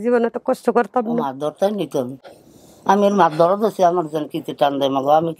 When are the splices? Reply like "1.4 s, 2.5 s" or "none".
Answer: none